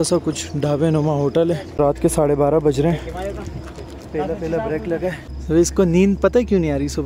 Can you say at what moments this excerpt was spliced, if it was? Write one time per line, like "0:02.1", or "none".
0:01.7
0:05.3